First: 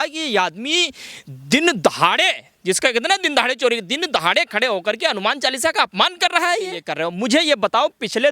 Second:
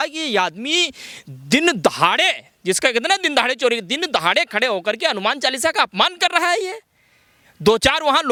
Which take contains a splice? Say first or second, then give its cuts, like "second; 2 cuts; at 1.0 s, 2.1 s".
first; 1 cut; at 6.9 s